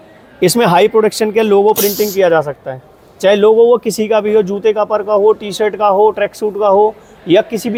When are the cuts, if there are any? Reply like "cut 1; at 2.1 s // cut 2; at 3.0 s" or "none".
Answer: none